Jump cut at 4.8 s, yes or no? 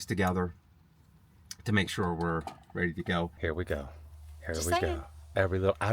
no